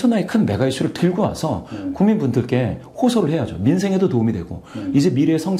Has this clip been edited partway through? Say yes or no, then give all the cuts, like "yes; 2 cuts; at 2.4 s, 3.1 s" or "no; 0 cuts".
no; 0 cuts